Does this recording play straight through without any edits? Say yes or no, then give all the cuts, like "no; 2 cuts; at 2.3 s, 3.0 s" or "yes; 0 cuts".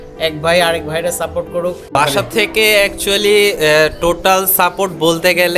no; 1 cut; at 2.0 s